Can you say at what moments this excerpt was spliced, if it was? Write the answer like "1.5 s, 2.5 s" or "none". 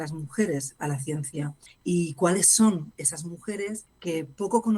1.6 s, 3.9 s